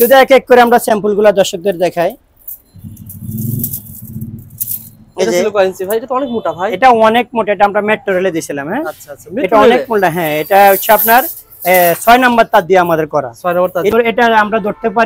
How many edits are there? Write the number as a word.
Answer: one